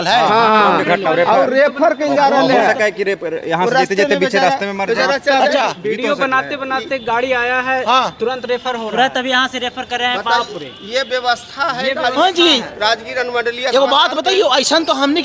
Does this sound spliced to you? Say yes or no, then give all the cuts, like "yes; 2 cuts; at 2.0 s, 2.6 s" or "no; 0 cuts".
no; 0 cuts